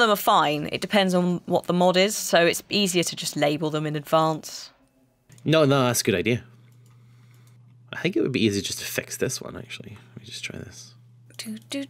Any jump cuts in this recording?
yes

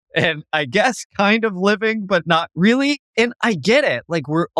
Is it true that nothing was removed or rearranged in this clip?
no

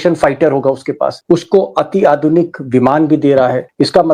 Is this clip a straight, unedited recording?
no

